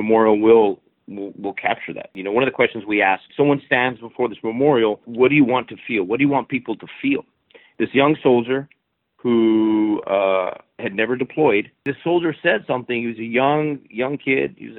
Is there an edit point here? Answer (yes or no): yes